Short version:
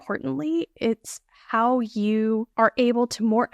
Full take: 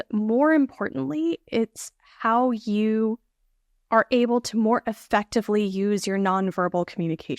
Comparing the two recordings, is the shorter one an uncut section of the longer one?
no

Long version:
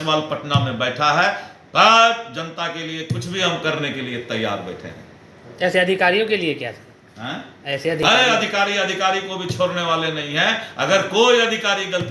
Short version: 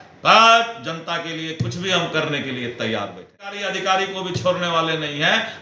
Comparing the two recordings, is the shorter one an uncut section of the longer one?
no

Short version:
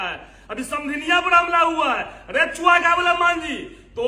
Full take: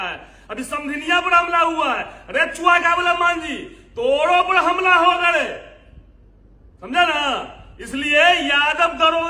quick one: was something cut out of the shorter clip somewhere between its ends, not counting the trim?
no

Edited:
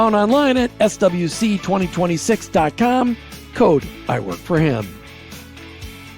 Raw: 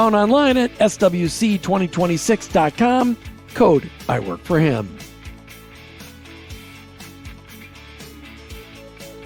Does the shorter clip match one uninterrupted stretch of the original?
no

